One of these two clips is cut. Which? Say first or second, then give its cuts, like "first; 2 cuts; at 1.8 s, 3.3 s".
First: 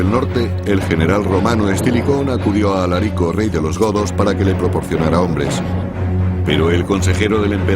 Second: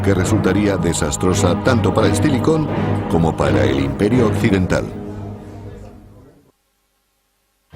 first; 1 cut; at 1.7 s